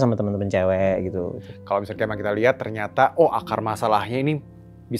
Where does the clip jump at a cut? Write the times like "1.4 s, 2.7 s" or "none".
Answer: 1.4 s

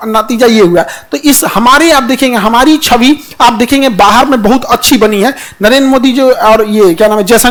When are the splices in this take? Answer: none

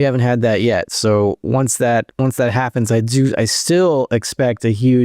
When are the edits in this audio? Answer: 2.1 s

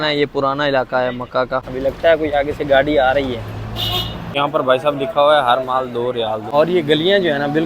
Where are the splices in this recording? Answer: 1.7 s, 4.3 s, 6.4 s

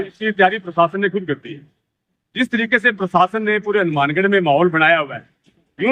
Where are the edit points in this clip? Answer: none

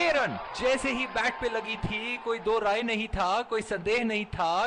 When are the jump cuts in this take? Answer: none

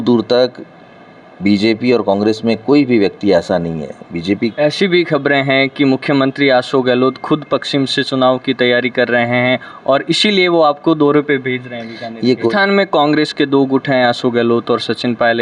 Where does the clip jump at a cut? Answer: 4.5 s, 12.5 s

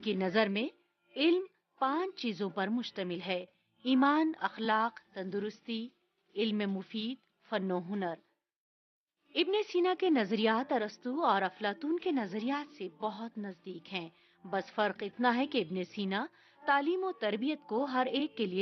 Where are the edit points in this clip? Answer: 11.8 s

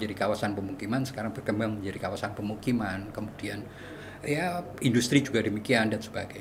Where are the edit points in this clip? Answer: none

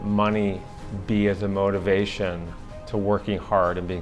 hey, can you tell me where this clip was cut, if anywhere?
none

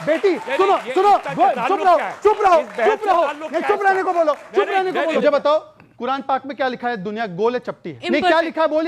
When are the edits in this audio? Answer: 5.2 s, 7.9 s

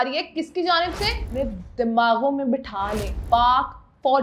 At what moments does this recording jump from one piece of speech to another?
1.2 s, 3.1 s

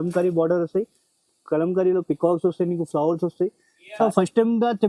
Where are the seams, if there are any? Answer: 3.9 s

